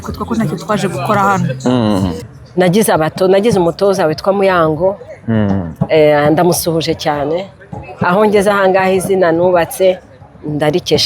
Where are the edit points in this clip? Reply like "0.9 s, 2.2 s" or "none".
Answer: 2.3 s